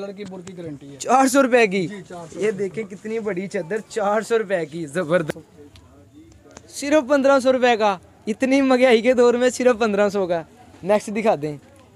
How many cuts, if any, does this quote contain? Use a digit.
1